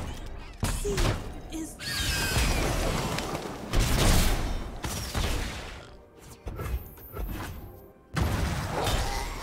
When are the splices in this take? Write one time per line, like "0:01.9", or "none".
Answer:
0:07.9